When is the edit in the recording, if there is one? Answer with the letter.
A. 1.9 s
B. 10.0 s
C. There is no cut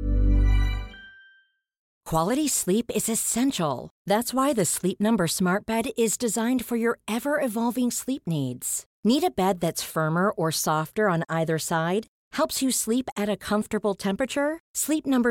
A